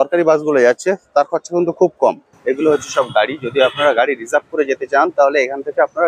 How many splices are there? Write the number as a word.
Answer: one